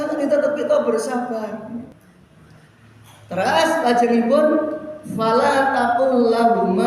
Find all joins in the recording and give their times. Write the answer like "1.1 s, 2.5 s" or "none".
1.9 s